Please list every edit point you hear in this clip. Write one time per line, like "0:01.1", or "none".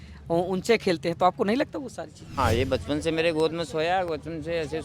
0:02.3